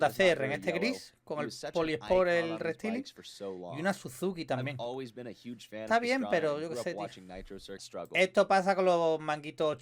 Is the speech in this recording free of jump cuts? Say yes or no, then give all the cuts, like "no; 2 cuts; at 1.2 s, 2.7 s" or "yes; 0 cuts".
no; 1 cut; at 7.8 s